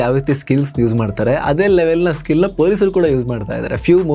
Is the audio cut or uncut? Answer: uncut